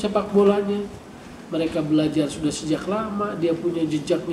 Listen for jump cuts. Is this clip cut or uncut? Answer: uncut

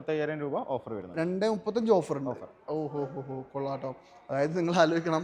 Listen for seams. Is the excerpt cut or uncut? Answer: uncut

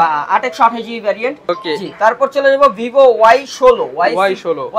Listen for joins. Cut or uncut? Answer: cut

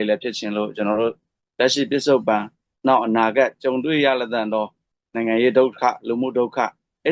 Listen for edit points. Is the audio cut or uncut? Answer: cut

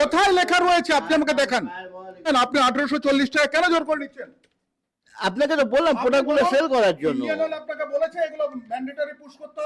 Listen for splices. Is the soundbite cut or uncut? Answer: cut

